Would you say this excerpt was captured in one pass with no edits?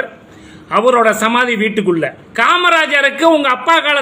no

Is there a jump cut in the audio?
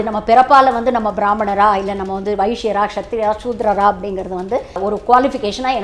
yes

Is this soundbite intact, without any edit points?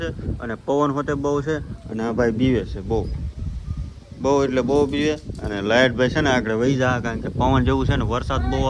yes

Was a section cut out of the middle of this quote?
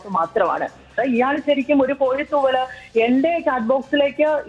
yes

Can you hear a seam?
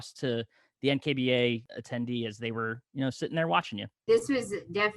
yes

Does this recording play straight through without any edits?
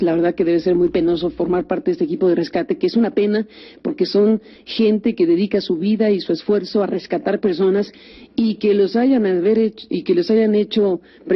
yes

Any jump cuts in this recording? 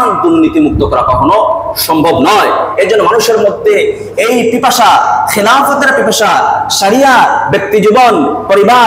no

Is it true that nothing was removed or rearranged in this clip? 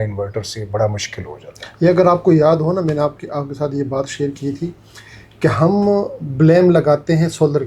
yes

